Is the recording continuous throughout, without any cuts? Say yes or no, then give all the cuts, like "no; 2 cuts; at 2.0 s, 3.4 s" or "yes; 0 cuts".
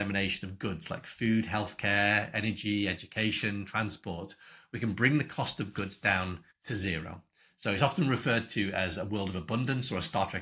no; 1 cut; at 6.5 s